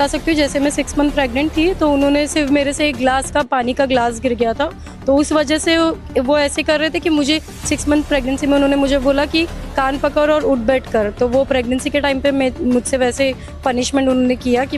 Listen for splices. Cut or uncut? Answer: uncut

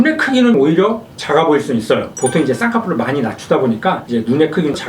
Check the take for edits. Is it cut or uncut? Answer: cut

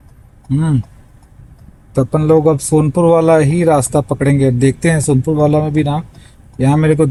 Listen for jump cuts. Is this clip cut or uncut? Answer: uncut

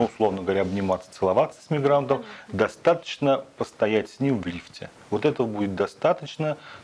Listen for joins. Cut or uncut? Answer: uncut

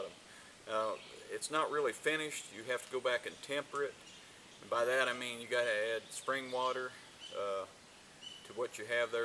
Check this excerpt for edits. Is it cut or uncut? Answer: uncut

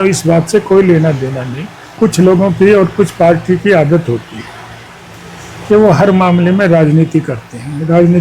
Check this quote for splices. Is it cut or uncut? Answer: cut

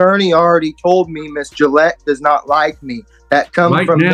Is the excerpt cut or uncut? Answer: uncut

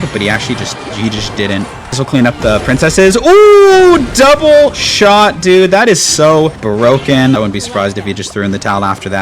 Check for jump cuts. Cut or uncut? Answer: cut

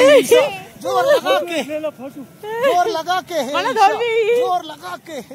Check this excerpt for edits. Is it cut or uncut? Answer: uncut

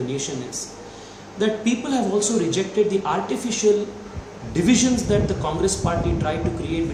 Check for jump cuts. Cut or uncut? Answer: uncut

